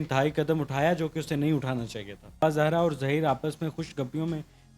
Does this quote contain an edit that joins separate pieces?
yes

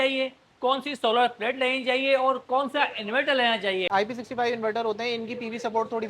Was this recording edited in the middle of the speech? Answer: yes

